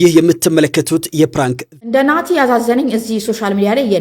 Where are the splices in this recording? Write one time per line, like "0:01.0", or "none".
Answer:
0:01.6